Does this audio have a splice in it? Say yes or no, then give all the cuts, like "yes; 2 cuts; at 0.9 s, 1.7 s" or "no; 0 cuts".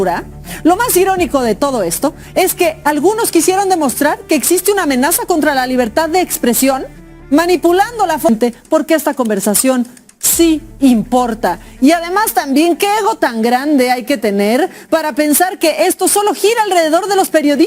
yes; 1 cut; at 8.3 s